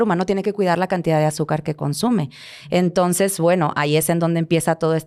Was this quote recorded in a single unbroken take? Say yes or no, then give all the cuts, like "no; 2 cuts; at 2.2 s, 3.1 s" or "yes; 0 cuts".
yes; 0 cuts